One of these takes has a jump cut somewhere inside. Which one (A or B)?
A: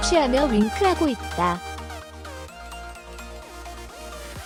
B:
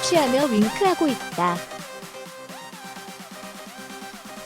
B